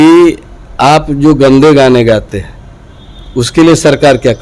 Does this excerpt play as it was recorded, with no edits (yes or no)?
yes